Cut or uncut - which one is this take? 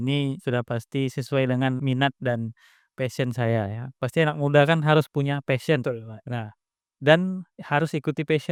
uncut